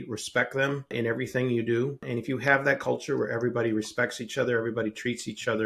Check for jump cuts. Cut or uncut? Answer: cut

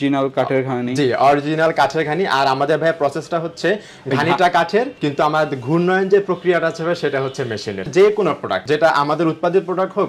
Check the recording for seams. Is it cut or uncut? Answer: cut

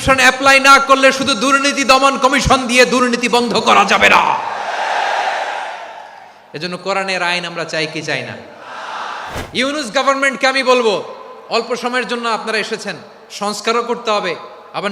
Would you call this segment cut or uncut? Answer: cut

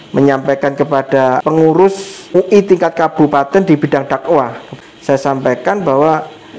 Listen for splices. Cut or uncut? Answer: cut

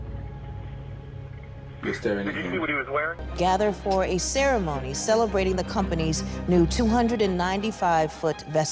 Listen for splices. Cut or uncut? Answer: cut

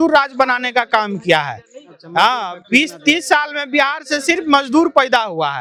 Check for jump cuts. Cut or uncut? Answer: uncut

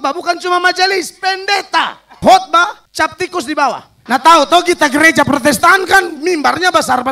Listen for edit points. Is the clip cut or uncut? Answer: cut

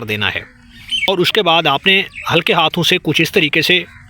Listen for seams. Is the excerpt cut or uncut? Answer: cut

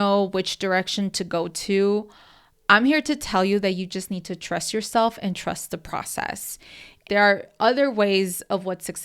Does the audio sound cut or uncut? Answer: cut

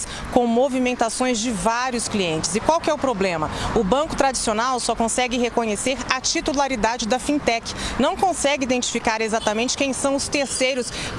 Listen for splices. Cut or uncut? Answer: uncut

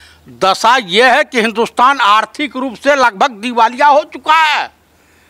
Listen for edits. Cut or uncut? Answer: uncut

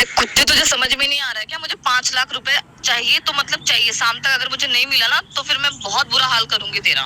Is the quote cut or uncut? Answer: uncut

